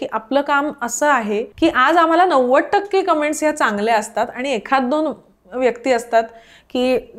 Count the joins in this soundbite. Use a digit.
1